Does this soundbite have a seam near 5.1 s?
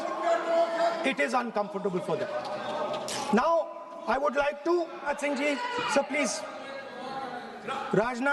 yes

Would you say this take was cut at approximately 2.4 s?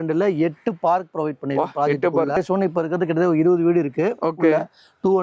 yes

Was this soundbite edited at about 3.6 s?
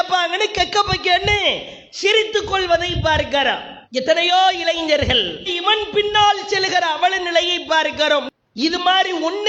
no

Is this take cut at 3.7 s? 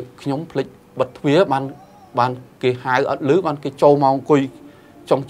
no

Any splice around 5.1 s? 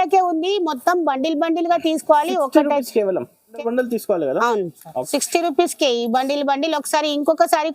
yes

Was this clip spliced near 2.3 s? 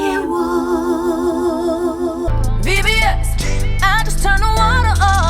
yes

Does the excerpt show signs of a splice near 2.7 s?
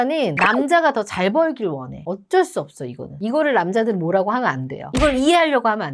no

